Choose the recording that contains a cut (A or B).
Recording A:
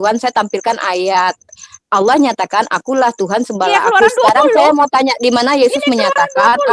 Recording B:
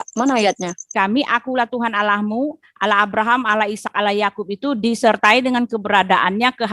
B